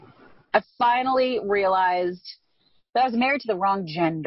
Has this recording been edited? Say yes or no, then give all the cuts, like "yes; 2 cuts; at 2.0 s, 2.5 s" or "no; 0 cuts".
yes; 1 cut; at 2.7 s